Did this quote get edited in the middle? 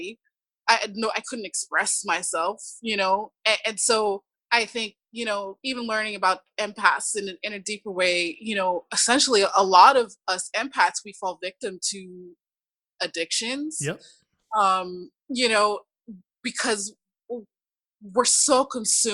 yes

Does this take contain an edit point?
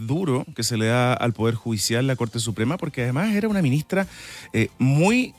no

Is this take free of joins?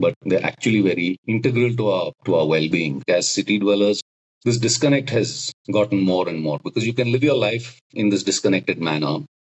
no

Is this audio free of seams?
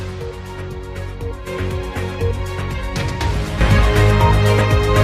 no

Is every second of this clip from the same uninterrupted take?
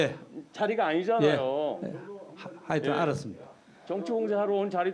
yes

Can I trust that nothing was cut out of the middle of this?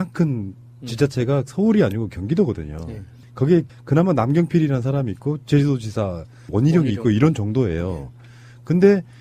no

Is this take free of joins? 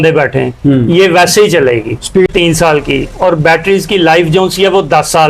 no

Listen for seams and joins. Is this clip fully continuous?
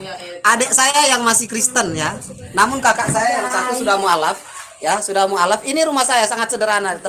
yes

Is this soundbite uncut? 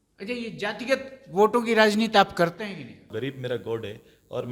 no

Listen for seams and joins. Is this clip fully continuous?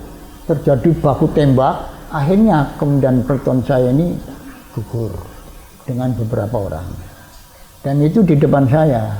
yes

